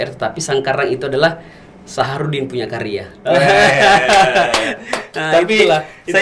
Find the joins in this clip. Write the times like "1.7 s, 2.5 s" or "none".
none